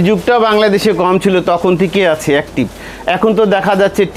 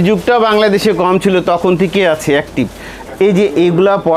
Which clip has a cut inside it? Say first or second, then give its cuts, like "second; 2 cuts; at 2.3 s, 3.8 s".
second; 1 cut; at 3.0 s